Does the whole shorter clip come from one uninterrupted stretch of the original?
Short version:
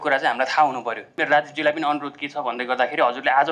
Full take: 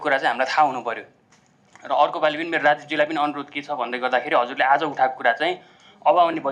no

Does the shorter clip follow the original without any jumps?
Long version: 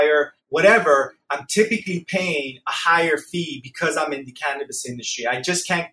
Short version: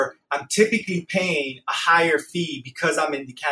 yes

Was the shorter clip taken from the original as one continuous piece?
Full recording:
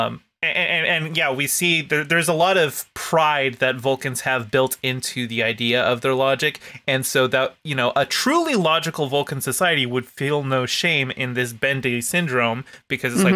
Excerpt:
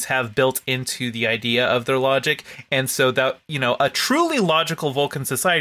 yes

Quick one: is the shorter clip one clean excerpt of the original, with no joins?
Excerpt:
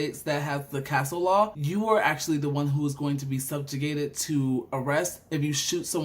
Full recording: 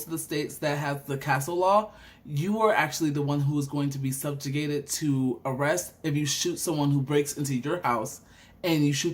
no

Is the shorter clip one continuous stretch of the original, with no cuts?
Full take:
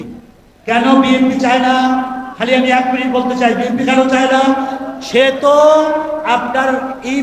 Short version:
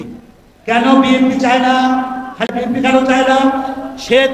no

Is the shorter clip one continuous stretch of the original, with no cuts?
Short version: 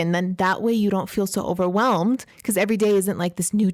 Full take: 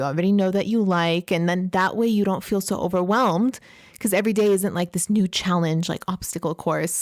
no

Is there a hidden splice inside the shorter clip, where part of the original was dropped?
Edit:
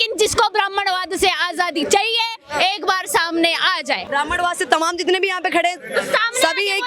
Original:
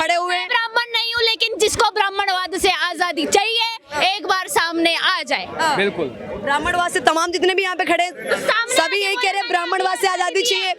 yes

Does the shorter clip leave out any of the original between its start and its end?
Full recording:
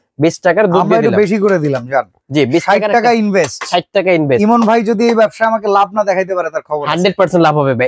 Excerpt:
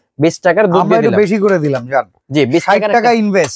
no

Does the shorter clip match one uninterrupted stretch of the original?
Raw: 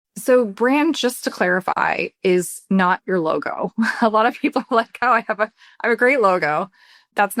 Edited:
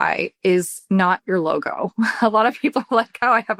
yes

